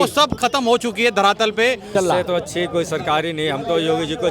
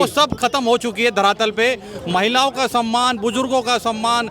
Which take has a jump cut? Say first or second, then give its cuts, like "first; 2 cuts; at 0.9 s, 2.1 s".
first; 1 cut; at 1.9 s